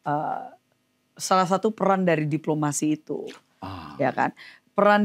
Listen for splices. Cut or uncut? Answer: uncut